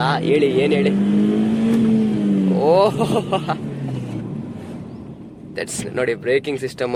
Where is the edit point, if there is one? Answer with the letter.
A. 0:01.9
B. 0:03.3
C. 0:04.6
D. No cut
D